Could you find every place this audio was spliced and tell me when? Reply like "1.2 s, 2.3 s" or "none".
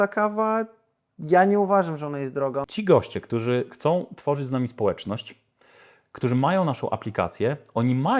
2.6 s